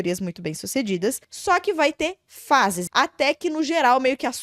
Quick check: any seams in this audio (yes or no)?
yes